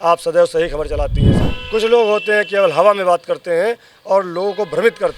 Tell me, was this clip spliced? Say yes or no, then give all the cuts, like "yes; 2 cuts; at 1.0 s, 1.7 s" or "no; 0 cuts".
yes; 1 cut; at 1.4 s